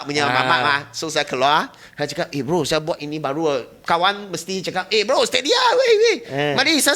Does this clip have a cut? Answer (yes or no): no